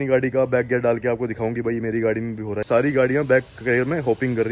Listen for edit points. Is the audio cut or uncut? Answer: cut